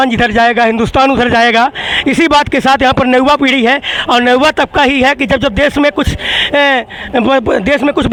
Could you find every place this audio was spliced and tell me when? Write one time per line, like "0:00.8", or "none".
none